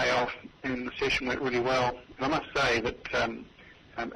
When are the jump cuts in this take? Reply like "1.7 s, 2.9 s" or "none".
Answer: 2.1 s, 3.3 s